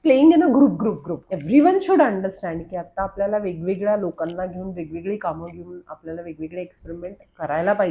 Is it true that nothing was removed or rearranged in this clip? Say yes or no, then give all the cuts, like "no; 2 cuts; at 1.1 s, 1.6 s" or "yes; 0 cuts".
no; 1 cut; at 1.1 s